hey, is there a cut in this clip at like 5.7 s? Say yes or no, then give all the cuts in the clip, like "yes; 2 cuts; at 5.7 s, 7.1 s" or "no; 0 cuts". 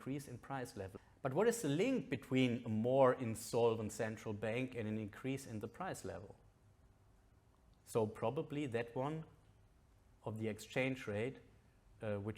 no; 1 cut; at 1.0 s